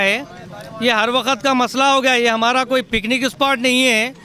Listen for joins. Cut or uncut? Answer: uncut